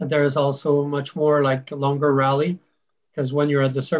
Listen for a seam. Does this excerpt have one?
no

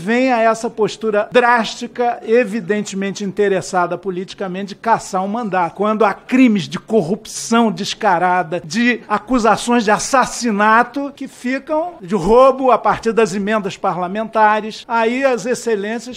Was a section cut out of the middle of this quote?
no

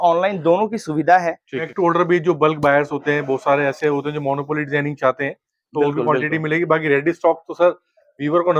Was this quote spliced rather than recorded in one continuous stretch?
yes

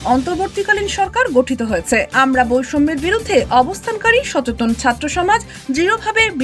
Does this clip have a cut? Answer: yes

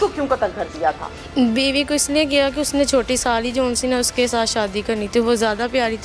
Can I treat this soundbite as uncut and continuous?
yes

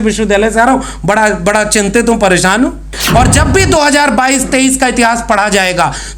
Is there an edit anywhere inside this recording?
yes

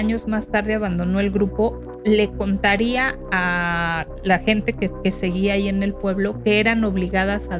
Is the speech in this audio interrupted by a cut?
no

